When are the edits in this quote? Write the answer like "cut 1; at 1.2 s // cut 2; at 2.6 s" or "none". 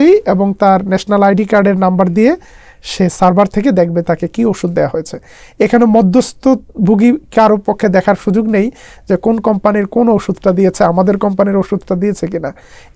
none